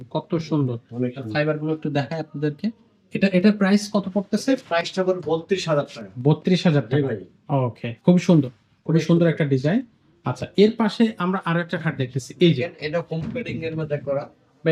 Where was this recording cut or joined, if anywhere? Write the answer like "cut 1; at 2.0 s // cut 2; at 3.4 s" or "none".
none